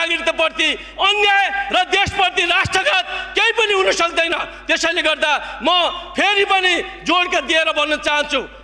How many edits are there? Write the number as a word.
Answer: zero